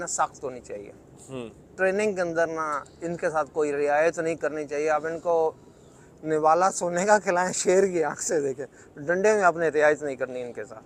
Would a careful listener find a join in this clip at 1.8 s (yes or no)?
no